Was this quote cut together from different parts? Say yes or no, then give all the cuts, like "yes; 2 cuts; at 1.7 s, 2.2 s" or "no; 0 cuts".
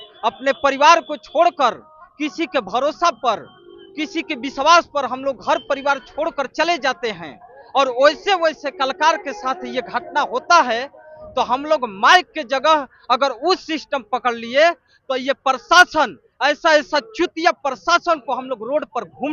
no; 0 cuts